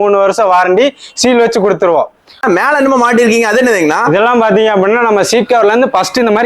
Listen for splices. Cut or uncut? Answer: cut